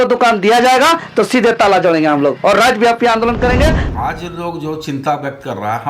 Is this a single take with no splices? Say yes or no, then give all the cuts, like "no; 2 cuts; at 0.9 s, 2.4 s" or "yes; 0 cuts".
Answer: no; 1 cut; at 3.8 s